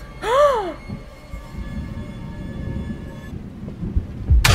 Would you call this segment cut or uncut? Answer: uncut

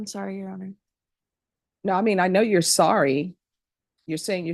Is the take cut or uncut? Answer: uncut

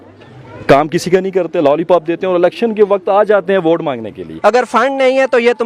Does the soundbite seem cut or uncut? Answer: cut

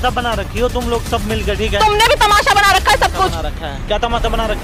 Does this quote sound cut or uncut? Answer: uncut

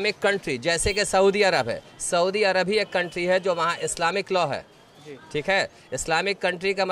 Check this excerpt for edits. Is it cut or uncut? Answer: uncut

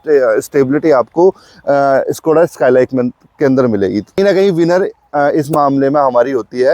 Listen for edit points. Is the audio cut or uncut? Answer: cut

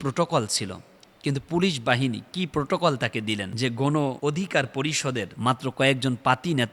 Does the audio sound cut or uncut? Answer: cut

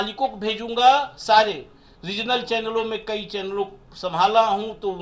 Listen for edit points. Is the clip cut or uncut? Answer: uncut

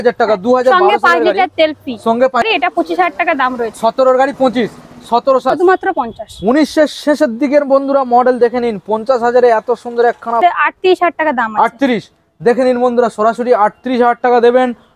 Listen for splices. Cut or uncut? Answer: cut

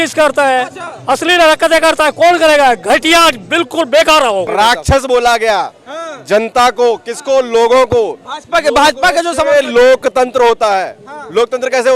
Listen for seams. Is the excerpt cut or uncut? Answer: cut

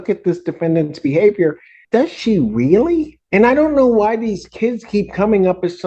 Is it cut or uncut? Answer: cut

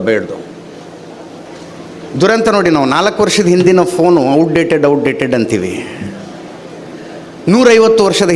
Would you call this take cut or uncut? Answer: cut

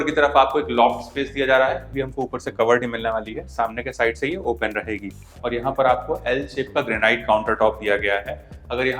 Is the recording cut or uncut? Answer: cut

